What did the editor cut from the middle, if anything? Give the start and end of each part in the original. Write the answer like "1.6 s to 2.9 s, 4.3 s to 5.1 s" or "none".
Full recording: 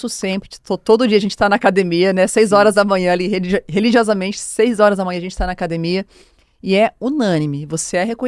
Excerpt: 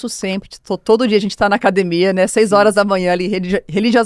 none